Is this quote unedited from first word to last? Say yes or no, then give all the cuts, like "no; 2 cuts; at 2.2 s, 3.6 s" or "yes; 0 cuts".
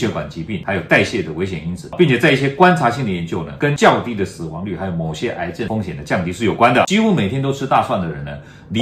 no; 1 cut; at 6.9 s